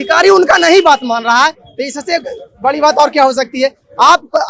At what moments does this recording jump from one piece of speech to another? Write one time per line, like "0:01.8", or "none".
none